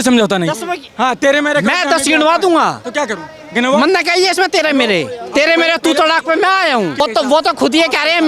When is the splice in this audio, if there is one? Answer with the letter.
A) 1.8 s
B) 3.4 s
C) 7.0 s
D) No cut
C